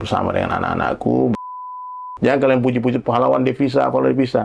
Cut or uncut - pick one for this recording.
cut